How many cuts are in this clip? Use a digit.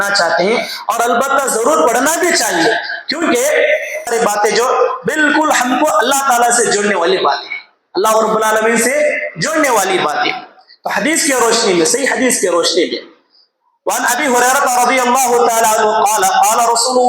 1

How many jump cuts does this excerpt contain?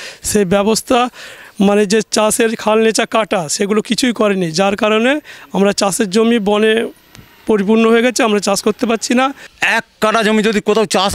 1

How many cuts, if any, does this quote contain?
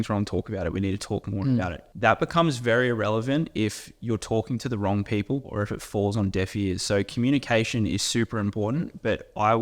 1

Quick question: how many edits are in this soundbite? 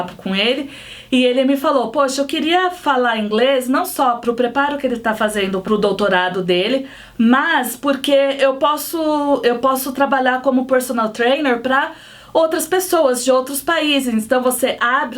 2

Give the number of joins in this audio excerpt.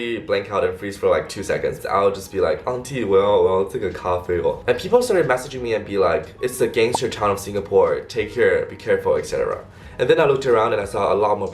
3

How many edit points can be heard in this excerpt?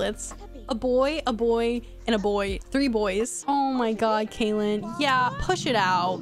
1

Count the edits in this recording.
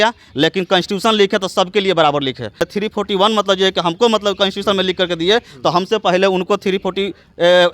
1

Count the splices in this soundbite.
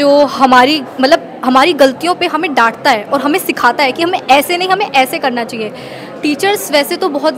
0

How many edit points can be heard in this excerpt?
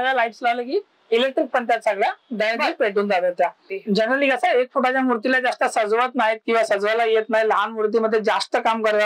1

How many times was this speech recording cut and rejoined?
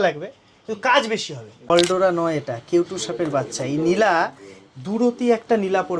1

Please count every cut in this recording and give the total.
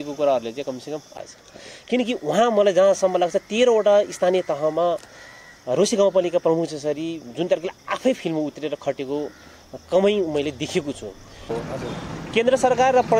2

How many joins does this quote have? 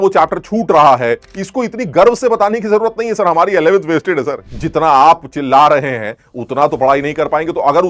2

